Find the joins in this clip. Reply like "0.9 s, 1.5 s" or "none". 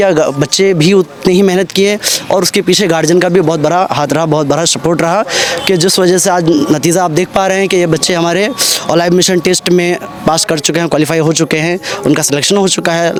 none